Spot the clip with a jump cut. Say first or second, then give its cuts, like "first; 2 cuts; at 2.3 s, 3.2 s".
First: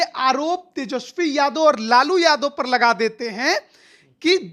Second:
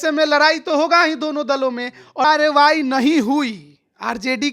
second; 1 cut; at 2.2 s